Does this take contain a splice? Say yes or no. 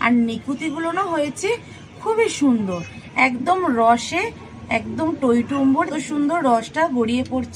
yes